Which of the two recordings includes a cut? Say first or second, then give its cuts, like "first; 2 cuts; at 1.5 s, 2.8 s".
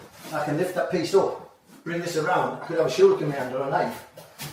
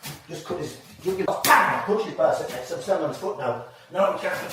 second; 1 cut; at 1.3 s